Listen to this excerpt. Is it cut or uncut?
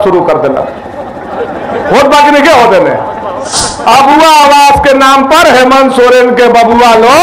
cut